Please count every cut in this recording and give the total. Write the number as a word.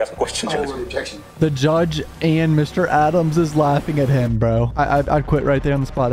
two